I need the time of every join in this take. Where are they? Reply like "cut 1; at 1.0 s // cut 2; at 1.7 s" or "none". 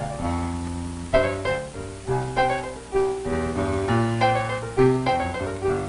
cut 1; at 2.2 s